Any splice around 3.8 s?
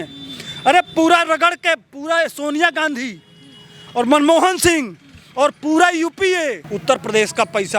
no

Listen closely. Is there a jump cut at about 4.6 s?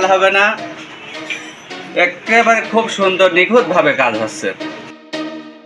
yes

